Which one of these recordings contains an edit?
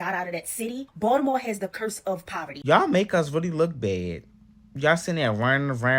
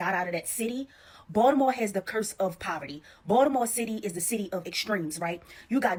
first; 2 cuts; at 0.9 s, 2.6 s

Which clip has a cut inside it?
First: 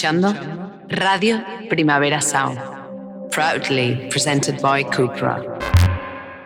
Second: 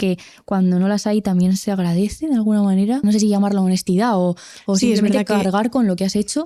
second; 1 cut; at 3.0 s

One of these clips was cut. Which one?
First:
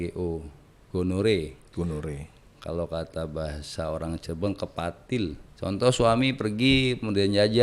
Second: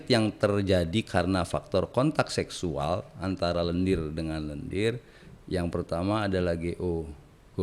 first; 1 cut; at 5.5 s

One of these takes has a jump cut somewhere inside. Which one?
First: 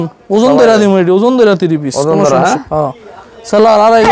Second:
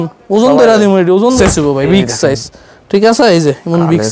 second; 1 cut; at 1.4 s

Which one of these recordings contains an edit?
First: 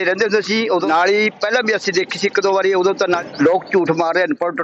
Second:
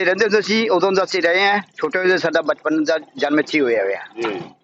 first; 2 cuts; at 0.9 s, 3.2 s

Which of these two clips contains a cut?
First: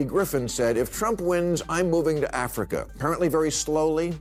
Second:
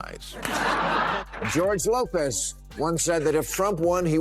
second; 1 cut; at 1.2 s

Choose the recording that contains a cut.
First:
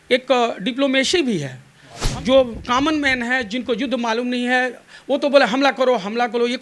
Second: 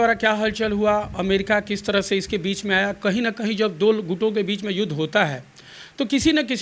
first; 1 cut; at 2.1 s

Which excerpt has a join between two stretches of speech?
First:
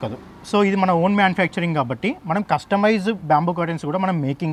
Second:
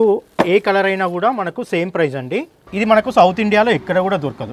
second; 1 cut; at 2.6 s

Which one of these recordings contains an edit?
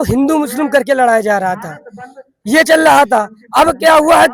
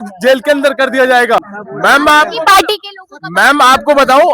second; 1 cut; at 1.6 s

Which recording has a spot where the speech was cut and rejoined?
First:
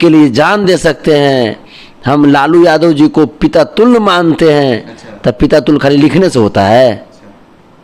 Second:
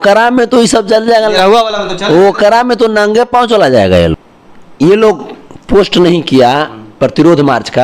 second; 1 cut; at 4.3 s

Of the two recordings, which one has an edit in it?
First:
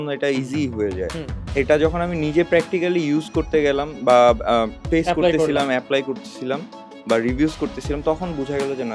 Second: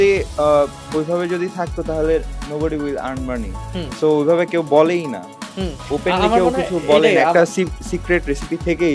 first; 2 cuts; at 1.4 s, 4.8 s

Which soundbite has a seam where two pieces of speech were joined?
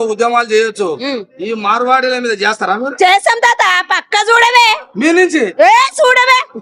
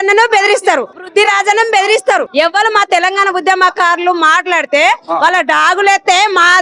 second; 2 cuts; at 1.1 s, 2.3 s

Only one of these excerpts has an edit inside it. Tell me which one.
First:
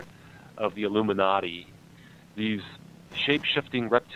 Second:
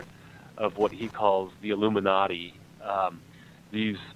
first; 3 cuts; at 0.7 s, 1.9 s, 3.1 s

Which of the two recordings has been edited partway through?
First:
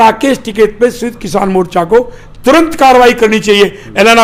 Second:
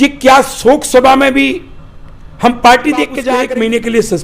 second; 1 cut; at 3.2 s

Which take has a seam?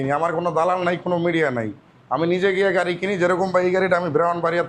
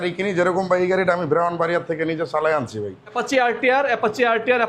second; 1 cut; at 3.0 s

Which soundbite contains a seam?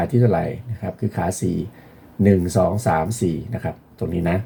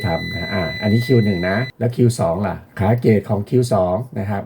second; 2 cuts; at 1.7 s, 2.7 s

